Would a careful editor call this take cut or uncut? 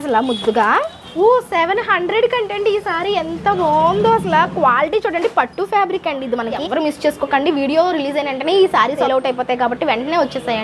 cut